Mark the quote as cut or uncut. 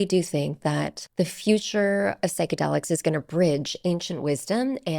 cut